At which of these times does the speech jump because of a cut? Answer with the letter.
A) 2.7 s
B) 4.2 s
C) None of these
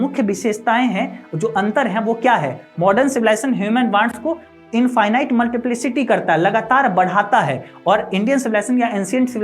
B